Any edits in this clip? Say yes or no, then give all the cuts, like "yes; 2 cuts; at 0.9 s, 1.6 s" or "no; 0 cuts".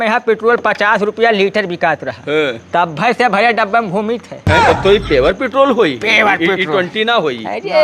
yes; 1 cut; at 4.4 s